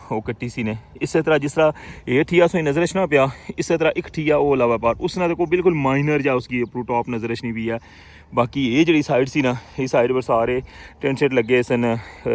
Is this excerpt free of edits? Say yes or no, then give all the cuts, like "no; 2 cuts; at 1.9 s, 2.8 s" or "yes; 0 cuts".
no; 1 cut; at 0.9 s